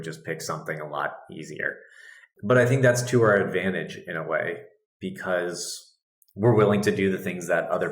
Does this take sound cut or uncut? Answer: cut